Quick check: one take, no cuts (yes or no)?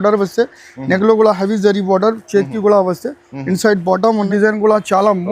no